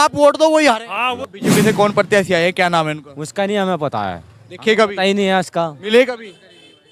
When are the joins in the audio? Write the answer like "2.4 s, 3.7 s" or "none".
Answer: 1.1 s

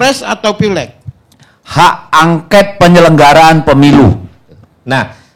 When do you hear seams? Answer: 4.4 s

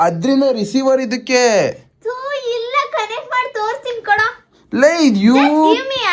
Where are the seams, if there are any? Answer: none

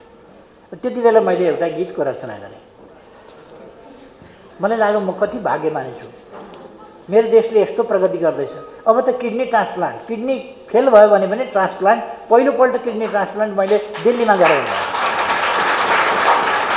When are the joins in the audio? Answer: none

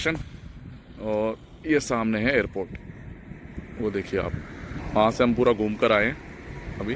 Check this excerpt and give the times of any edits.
4.8 s

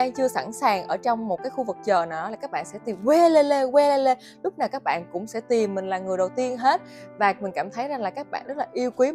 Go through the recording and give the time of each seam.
none

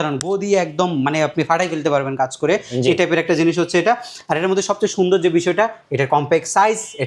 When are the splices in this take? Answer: none

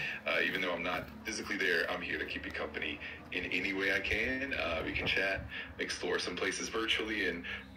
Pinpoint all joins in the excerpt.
none

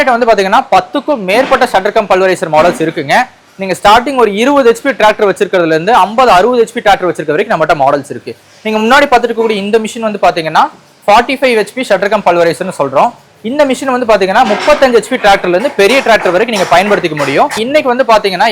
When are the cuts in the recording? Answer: 17.6 s

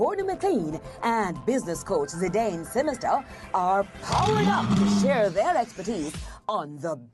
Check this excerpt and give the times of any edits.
none

